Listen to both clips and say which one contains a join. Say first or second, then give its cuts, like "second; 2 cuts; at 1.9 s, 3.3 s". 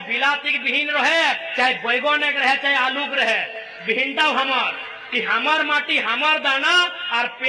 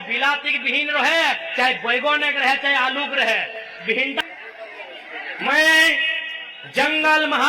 second; 1 cut; at 4.2 s